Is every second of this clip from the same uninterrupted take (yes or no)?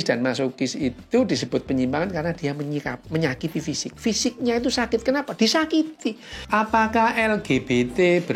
no